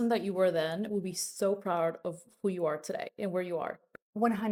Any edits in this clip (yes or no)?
no